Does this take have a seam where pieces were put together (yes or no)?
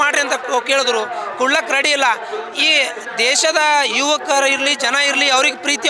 no